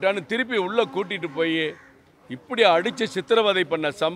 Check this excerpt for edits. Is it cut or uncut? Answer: uncut